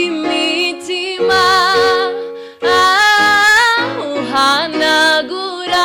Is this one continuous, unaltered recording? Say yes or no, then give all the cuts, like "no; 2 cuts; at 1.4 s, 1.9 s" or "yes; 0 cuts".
yes; 0 cuts